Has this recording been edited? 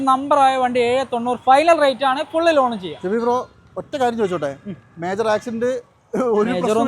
no; 0 cuts

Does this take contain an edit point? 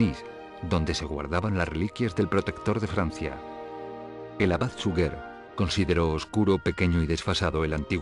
yes; 1 cut; at 1.2 s

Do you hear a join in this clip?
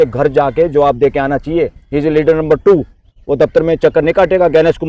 no; 0 cuts

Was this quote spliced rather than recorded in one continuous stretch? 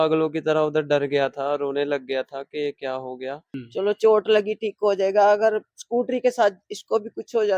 yes; 1 cut; at 3.5 s

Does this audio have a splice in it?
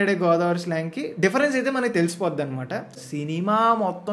yes; 1 cut; at 3.0 s

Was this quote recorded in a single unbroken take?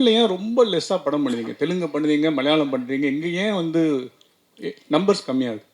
yes; 0 cuts

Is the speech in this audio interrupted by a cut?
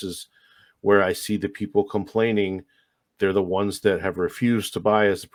no; 0 cuts

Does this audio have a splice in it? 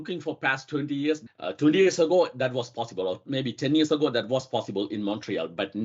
yes; 1 cut; at 1.2 s

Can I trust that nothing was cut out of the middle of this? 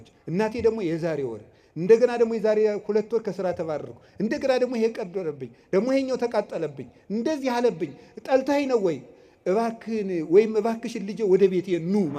yes; 0 cuts

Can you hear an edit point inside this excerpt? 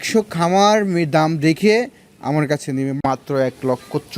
yes; 1 cut; at 3.0 s

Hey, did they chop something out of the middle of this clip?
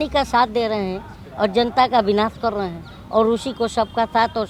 no; 0 cuts

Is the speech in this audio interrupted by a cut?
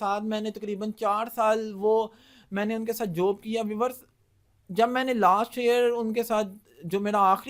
no; 0 cuts

